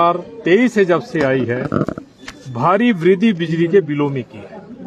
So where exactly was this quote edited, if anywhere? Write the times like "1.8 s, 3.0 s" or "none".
none